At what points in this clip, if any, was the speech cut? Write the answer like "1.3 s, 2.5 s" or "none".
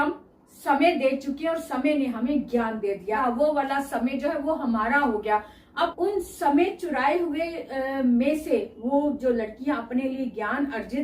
3.2 s, 5.9 s

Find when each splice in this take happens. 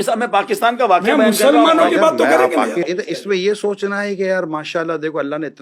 none

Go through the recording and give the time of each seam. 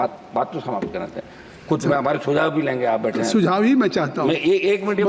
none

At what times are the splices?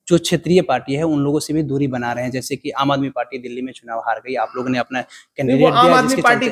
none

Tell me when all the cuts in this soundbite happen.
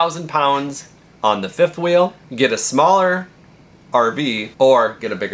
2.2 s, 4.5 s

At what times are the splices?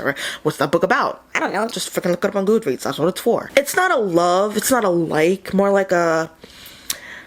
3.5 s

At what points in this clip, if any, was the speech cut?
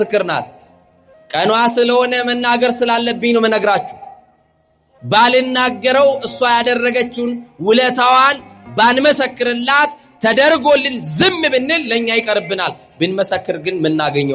none

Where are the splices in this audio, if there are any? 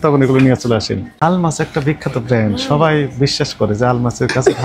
1.1 s

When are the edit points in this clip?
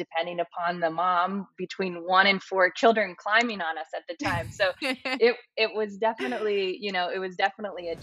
none

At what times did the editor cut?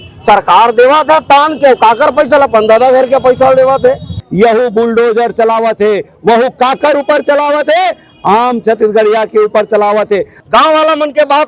4.2 s, 10.3 s

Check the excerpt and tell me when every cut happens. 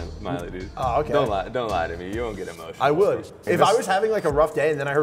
3.4 s

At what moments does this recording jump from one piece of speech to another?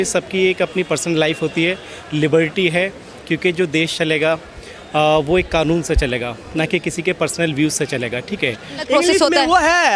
8.8 s

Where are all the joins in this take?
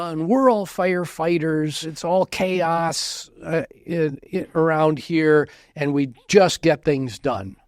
1.9 s

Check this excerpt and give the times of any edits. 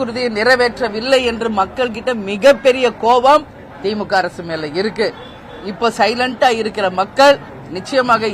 none

